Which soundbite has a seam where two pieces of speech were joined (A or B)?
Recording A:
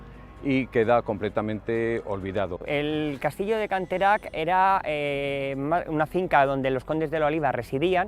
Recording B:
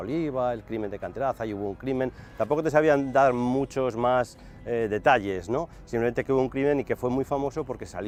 A